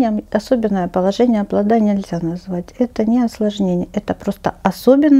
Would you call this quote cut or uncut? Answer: uncut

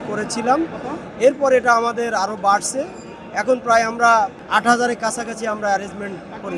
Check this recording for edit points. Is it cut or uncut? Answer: cut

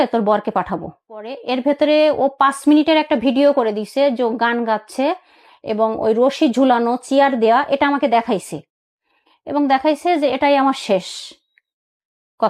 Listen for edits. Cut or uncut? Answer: cut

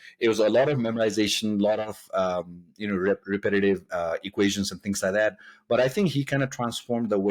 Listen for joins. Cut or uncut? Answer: uncut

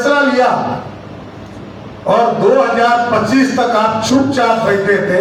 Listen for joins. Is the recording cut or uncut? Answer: uncut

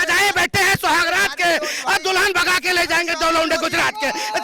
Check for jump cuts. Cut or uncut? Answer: uncut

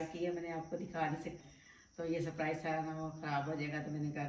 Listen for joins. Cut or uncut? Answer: cut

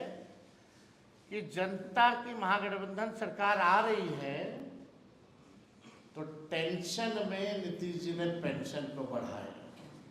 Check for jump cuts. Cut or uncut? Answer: uncut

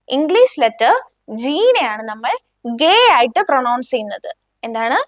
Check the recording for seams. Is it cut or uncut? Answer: uncut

